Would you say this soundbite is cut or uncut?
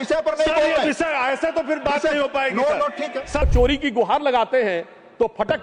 cut